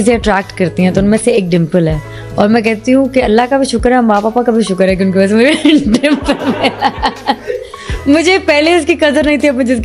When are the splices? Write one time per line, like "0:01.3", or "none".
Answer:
none

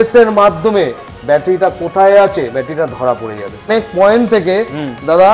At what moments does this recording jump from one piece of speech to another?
0:03.7

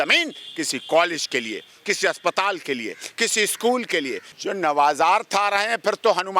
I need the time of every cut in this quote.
0:04.3

